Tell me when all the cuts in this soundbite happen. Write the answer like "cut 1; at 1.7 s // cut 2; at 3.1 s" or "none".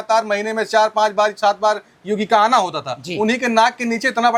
none

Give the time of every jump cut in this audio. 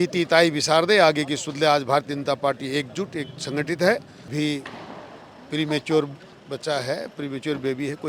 cut 1; at 4.3 s

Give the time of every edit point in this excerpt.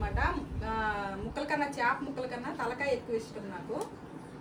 none

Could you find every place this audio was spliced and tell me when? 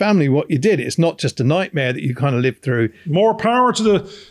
cut 1; at 3.0 s

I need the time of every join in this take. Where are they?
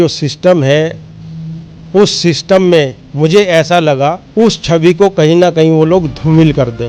cut 1; at 4.2 s

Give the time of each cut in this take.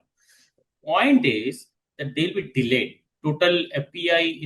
cut 1; at 3.0 s

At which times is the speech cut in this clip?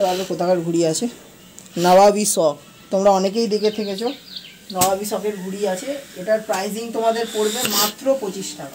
none

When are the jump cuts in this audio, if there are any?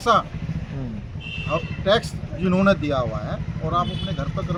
none

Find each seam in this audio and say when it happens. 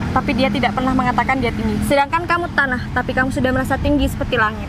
none

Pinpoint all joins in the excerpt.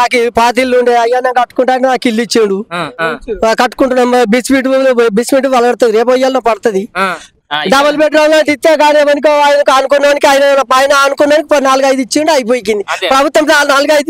cut 1; at 2.9 s // cut 2; at 7.3 s

